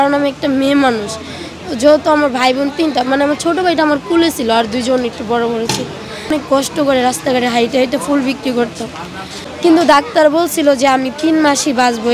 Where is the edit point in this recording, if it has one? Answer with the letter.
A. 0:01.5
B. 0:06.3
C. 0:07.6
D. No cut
B